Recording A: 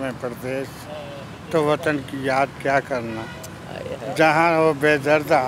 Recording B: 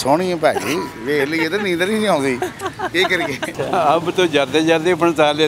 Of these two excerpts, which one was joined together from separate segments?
B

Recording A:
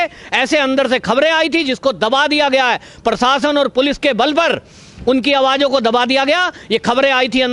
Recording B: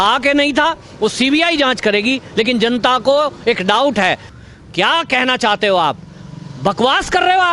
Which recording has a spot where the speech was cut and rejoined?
B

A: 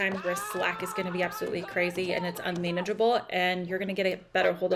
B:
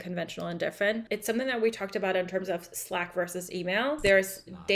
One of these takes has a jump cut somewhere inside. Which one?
B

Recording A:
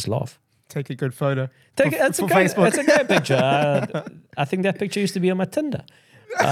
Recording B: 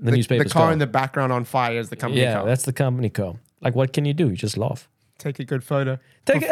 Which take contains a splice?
B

